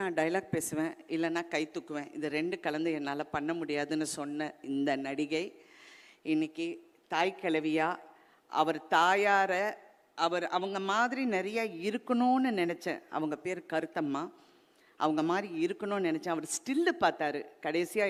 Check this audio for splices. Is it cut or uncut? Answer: uncut